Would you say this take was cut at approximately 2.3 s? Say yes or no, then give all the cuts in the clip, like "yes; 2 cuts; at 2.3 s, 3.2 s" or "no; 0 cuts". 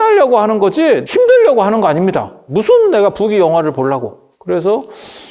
yes; 3 cuts; at 1.0 s, 2.3 s, 4.3 s